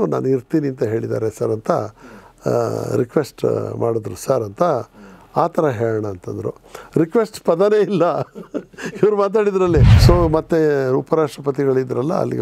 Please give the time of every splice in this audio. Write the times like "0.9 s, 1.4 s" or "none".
9.9 s